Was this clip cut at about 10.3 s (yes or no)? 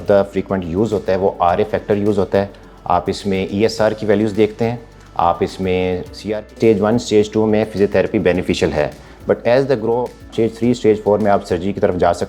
yes